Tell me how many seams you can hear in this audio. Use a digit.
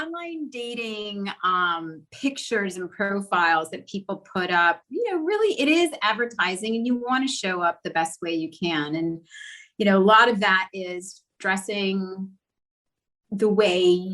0